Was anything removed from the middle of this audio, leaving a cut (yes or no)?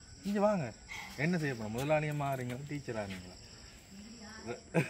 no